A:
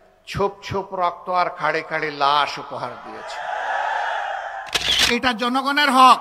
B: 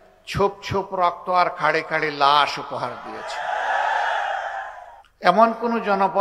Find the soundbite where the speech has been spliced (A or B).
A